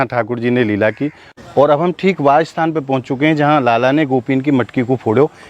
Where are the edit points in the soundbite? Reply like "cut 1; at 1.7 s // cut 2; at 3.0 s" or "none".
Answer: cut 1; at 1.2 s